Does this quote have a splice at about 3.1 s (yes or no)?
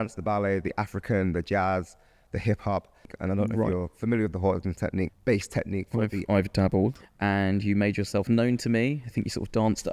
yes